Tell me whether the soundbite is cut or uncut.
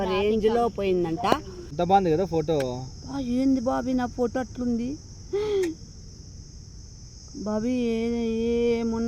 cut